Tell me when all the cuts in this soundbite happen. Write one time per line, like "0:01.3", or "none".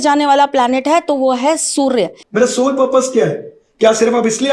0:02.2